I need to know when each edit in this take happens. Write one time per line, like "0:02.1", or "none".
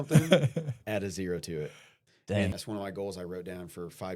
0:02.5